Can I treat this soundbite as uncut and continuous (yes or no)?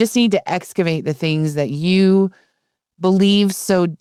yes